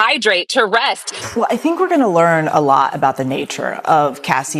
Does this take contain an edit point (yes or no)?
yes